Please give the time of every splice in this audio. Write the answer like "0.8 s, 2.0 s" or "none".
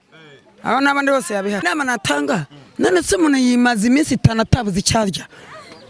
1.6 s